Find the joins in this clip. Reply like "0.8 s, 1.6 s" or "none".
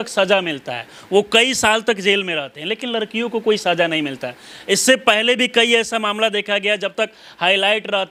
none

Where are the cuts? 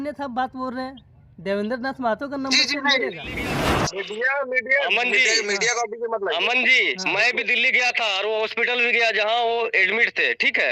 3.7 s

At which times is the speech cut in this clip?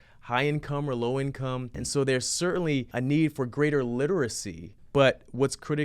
1.8 s, 2.9 s, 4.8 s

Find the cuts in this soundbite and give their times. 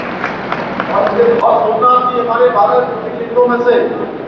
1.4 s

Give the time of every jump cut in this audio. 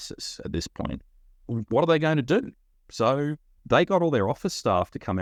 none

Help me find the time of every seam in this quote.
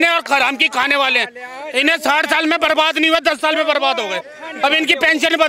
none

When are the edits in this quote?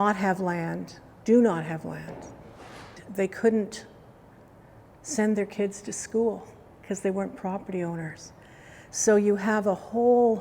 3.0 s

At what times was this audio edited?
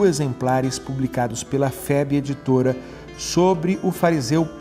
1.1 s

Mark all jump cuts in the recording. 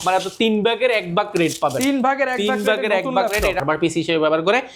3.6 s

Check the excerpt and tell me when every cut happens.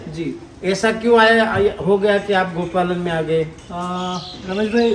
none

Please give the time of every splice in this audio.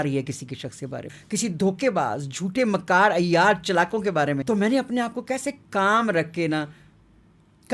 1.1 s, 4.4 s

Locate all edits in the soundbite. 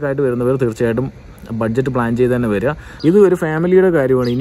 2.9 s

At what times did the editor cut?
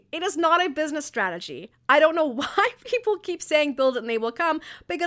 none

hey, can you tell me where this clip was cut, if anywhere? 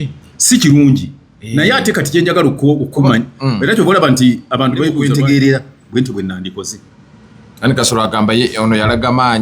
5.0 s

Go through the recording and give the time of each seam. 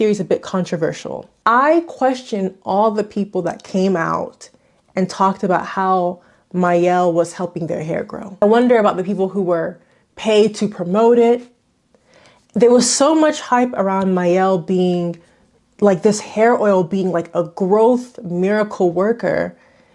8.3 s

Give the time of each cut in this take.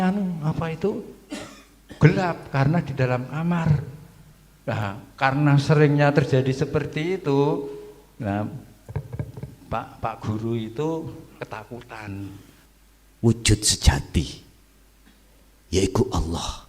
12.5 s

